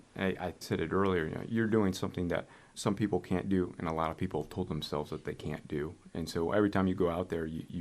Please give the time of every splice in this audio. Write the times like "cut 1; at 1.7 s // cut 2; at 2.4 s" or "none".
none